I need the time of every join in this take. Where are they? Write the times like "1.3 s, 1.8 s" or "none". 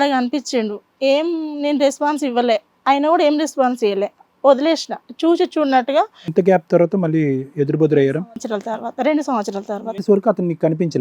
none